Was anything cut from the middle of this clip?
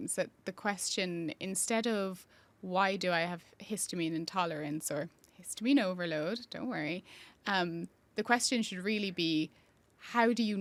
no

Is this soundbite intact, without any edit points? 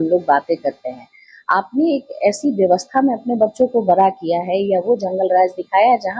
yes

